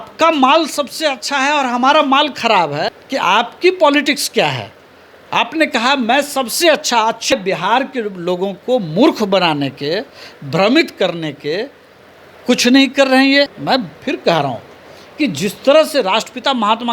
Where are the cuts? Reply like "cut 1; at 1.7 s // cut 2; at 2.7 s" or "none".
cut 1; at 3.0 s // cut 2; at 7.3 s // cut 3; at 13.6 s